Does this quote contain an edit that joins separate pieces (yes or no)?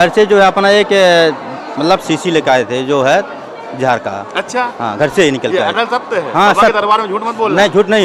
no